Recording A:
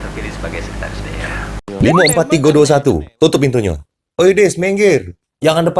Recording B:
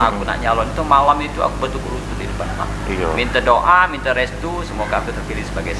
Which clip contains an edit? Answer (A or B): A